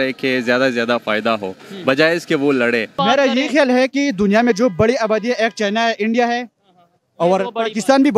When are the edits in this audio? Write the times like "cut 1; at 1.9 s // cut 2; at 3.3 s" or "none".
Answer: cut 1; at 2.9 s